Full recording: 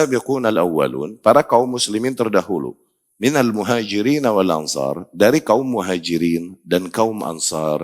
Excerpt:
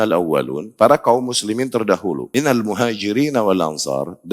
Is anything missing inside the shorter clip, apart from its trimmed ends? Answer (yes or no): yes